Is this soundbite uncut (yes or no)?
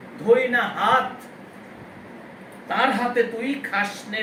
yes